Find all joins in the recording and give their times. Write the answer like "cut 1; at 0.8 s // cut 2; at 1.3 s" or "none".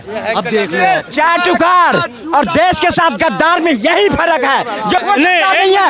cut 1; at 5.0 s